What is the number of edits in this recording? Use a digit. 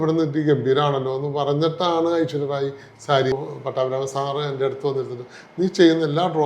1